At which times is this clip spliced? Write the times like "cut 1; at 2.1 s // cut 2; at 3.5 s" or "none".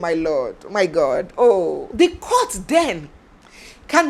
cut 1; at 1.8 s